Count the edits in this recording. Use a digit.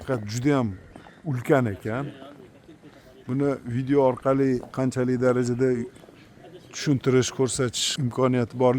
1